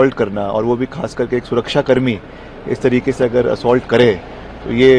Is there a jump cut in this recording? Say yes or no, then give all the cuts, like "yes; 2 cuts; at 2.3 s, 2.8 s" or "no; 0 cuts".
no; 0 cuts